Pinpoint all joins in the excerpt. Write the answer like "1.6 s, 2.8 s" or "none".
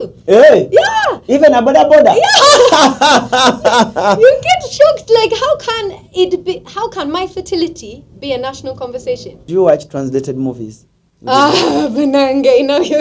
9.4 s